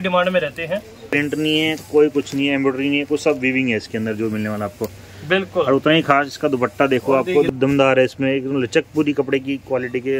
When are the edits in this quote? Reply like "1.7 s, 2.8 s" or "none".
1.1 s, 7.5 s